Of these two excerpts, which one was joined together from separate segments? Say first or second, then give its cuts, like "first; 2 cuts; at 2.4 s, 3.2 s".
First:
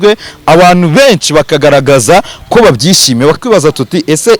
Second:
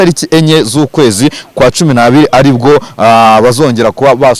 first; 1 cut; at 3.4 s